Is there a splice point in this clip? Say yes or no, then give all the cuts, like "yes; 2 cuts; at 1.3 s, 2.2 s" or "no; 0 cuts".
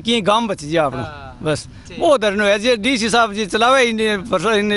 no; 0 cuts